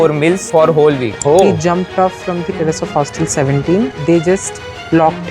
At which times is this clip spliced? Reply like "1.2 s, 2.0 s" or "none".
1.1 s, 3.9 s